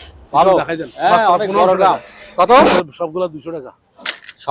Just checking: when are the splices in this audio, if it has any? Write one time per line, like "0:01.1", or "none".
0:02.8